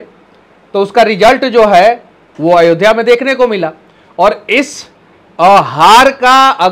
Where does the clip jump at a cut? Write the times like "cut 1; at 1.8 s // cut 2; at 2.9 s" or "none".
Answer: none